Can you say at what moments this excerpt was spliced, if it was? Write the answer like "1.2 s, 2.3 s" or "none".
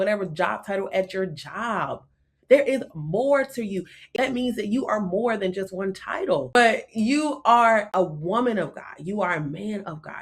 4.0 s, 6.6 s, 7.9 s